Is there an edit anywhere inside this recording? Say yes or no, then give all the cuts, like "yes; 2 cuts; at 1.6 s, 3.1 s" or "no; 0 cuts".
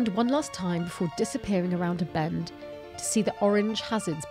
no; 0 cuts